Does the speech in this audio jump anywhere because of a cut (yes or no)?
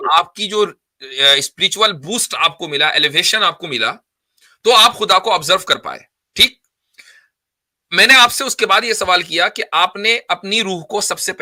no